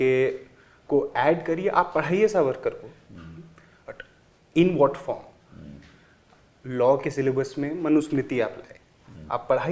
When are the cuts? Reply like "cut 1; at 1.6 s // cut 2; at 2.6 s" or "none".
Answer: none